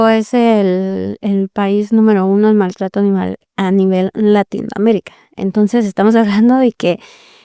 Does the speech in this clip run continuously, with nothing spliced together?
yes; 0 cuts

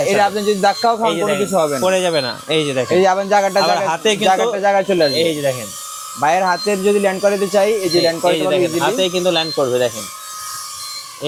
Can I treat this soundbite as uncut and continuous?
yes; 0 cuts

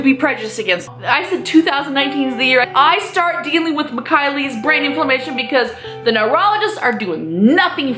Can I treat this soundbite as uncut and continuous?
no; 2 cuts; at 0.9 s, 2.7 s

